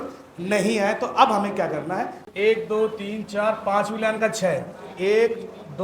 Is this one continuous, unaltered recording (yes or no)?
no